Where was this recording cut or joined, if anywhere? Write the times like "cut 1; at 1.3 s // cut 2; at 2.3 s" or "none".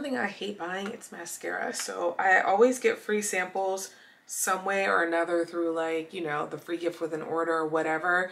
none